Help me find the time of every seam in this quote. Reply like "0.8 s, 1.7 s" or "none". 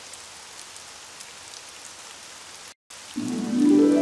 2.9 s